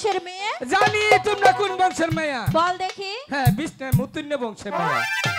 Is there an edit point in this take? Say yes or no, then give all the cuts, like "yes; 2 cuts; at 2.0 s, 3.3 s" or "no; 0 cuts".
no; 0 cuts